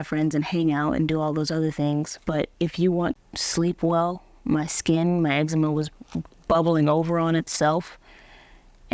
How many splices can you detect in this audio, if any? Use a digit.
1